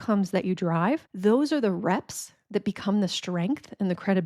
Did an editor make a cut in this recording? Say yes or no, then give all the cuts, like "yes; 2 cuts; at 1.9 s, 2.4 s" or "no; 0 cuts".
yes; 1 cut; at 1.1 s